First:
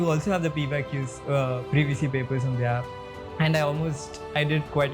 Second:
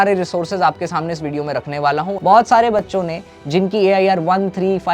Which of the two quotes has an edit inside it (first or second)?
second